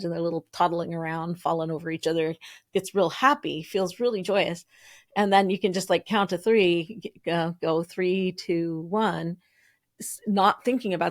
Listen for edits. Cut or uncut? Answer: uncut